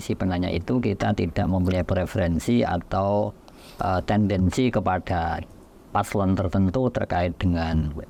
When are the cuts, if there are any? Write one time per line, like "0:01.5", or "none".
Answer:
none